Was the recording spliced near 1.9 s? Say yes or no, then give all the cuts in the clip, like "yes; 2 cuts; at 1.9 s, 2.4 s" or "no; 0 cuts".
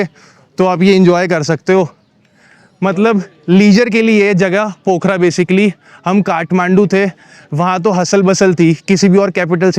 no; 0 cuts